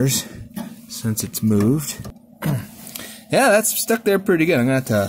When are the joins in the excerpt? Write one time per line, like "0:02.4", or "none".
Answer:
0:02.1